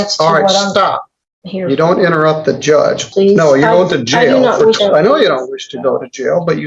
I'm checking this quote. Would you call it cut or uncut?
cut